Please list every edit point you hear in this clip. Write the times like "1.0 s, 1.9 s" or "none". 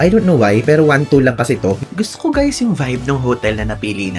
1.8 s